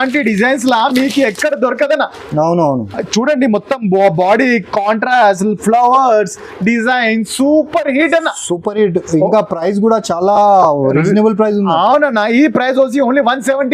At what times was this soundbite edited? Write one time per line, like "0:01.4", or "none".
none